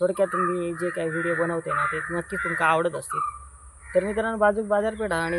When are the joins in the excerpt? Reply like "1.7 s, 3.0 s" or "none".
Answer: none